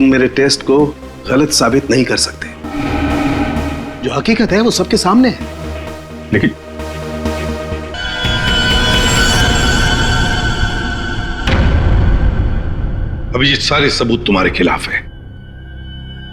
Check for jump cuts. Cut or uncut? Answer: cut